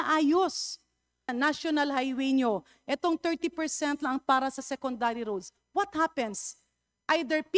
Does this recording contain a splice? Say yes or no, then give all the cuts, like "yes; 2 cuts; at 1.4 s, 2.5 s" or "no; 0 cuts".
yes; 1 cut; at 1.3 s